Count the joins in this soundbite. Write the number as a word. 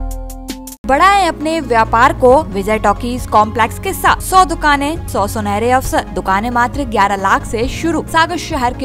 six